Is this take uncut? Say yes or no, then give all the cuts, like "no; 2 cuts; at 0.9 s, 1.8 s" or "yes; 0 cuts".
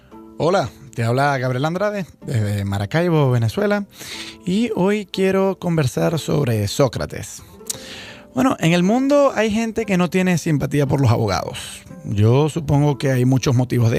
yes; 0 cuts